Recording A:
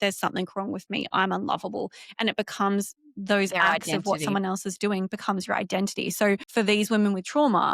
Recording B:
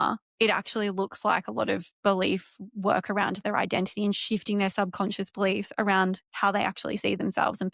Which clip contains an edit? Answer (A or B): A